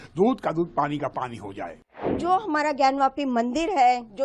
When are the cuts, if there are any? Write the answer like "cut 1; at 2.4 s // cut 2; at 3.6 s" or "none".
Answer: cut 1; at 2.1 s